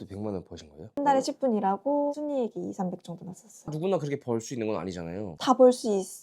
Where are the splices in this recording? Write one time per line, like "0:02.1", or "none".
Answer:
0:01.0
0:02.1
0:03.5
0:05.3